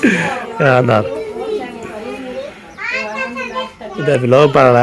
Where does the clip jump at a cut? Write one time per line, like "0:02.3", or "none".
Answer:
none